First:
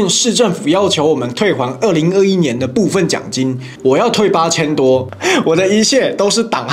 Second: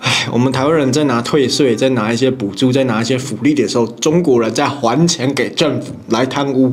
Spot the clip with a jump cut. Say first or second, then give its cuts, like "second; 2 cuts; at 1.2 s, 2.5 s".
first; 2 cuts; at 3.7 s, 5.1 s